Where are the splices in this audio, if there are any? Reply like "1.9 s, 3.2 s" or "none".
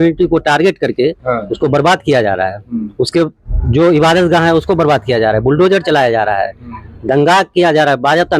none